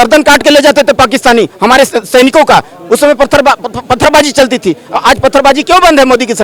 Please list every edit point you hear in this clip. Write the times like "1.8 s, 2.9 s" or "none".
none

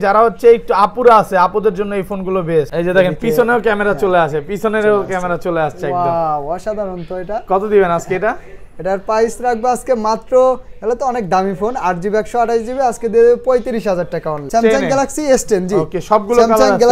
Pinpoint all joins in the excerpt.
2.7 s, 14.4 s

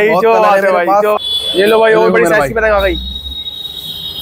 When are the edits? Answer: 1.2 s

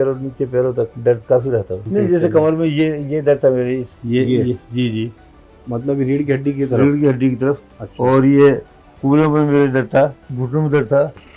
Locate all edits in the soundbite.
0.9 s, 1.8 s, 3.9 s, 10.3 s

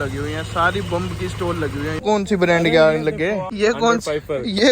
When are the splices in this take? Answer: 2.0 s, 3.5 s

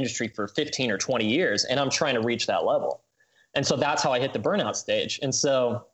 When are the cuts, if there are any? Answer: none

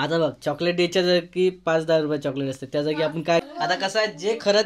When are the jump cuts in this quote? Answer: 3.4 s

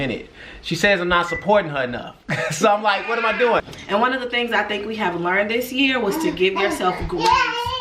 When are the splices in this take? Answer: 3.7 s

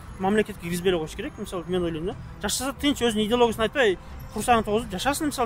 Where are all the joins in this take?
none

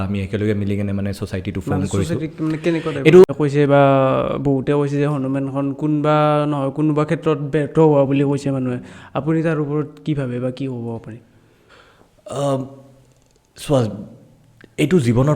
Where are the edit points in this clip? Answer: 3.3 s

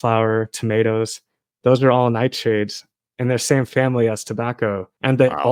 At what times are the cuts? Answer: none

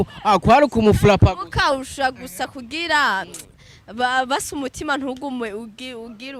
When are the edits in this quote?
none

